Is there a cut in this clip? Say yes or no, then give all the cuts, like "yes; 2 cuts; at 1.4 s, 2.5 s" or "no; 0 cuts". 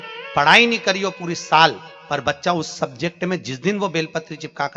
no; 0 cuts